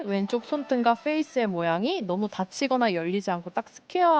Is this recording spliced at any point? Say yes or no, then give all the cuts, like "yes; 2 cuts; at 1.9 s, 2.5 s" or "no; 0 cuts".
no; 0 cuts